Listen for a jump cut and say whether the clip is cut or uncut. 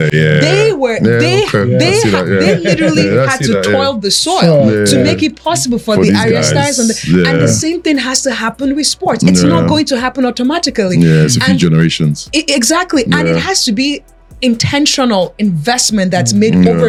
uncut